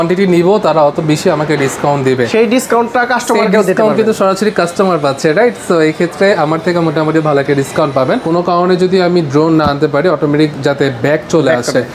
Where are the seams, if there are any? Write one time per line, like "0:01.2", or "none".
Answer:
0:08.2